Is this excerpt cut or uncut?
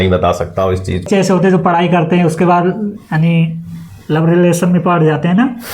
cut